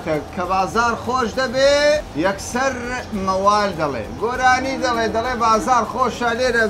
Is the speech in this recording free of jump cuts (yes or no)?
no